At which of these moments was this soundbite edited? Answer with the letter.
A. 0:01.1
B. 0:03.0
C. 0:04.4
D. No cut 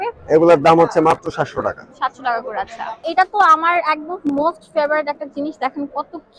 B